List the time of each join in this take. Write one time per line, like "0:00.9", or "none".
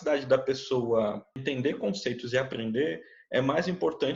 0:01.4

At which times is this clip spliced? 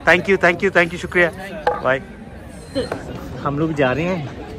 0:02.7

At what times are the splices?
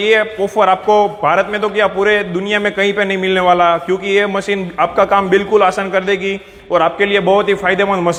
none

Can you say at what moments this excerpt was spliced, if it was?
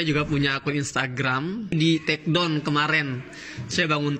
0:01.7

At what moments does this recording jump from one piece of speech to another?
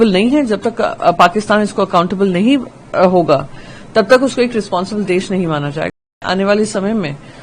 0:06.0

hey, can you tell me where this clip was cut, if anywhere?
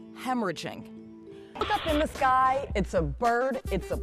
0:01.6

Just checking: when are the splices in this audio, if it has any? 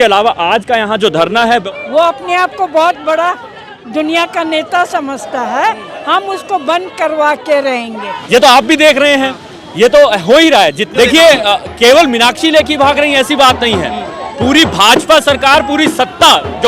0:01.7
0:08.2
0:10.8

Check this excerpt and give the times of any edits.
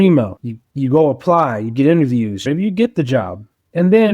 0:02.4

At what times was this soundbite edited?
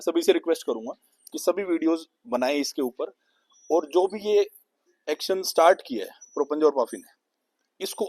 none

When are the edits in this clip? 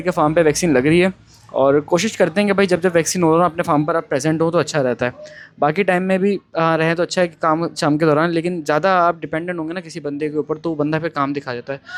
none

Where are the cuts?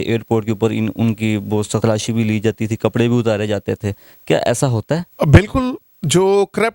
0:01.8
0:05.1

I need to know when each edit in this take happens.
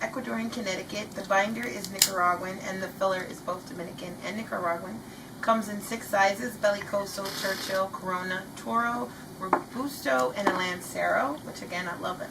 0:02.4

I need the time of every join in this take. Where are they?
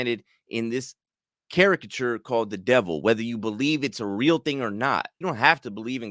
0:05.2

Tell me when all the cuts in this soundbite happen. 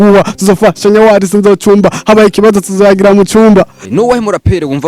0:03.8

